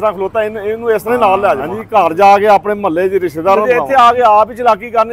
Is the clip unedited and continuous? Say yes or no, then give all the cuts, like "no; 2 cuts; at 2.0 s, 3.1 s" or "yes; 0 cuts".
no; 2 cuts; at 1.7 s, 3.6 s